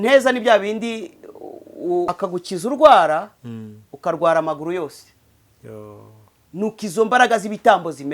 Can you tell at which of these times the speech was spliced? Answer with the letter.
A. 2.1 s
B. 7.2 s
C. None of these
A